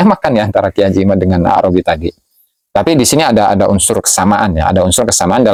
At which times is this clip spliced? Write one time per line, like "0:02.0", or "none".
none